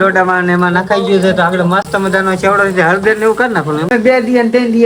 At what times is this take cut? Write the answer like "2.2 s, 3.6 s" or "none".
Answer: none